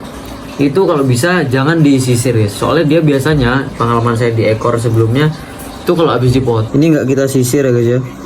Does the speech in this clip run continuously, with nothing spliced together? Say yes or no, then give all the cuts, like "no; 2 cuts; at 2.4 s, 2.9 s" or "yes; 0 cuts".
no; 1 cut; at 6.6 s